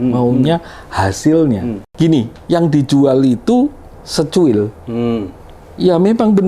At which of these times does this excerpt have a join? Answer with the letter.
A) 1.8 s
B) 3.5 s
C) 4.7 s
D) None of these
A